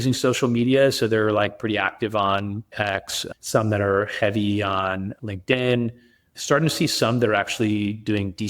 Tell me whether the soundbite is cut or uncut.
cut